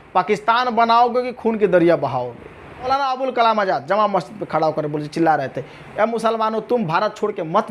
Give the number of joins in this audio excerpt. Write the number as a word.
one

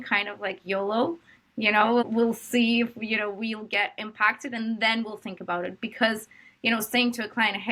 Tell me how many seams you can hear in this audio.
zero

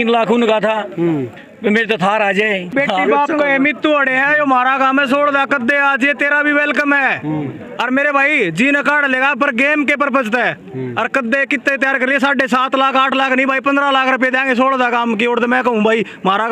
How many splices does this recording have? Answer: one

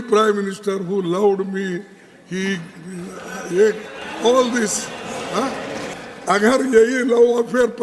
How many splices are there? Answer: one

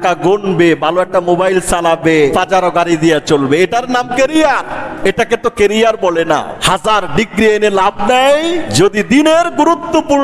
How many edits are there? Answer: four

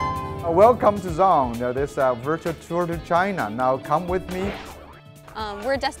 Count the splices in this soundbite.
one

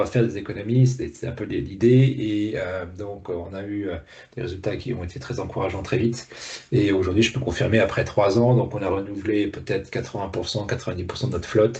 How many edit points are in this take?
zero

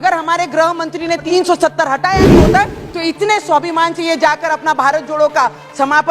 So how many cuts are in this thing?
one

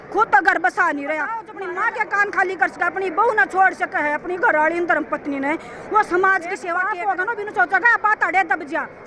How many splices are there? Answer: two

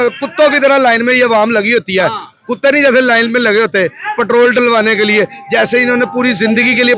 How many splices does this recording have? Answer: zero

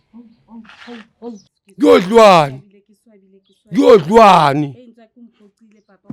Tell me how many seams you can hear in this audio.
one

